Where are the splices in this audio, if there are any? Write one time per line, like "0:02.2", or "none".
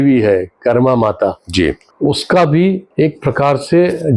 0:01.9
0:02.9